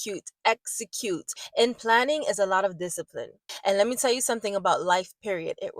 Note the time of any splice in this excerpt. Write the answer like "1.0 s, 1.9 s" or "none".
1.4 s, 3.5 s